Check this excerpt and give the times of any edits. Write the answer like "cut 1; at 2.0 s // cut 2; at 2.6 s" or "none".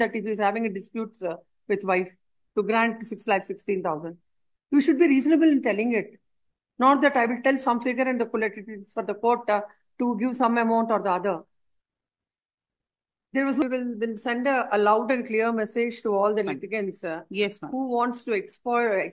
cut 1; at 13.6 s